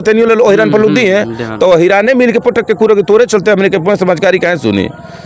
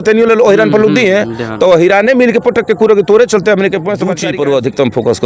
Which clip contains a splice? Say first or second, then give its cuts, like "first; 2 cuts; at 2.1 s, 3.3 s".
second; 1 cut; at 4.2 s